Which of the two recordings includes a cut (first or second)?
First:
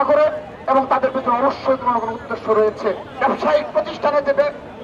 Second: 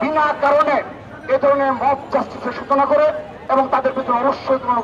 first